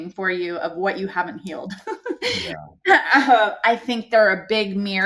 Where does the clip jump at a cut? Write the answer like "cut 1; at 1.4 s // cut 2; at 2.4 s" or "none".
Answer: none